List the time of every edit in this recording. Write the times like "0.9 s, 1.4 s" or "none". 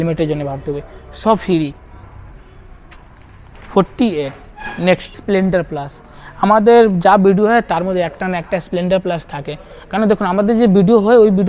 none